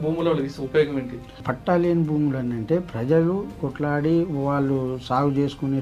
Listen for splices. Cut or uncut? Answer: cut